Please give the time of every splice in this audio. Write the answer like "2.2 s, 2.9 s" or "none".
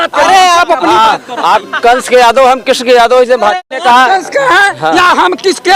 3.6 s